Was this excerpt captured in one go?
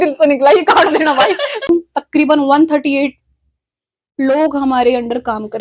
no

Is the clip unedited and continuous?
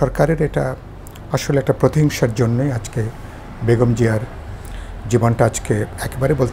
yes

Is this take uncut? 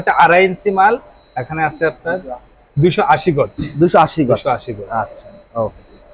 yes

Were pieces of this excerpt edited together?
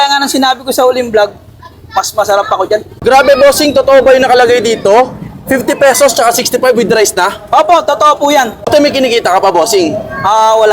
yes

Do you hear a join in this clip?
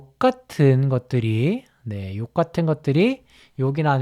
no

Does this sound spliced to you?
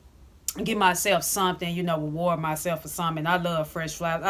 no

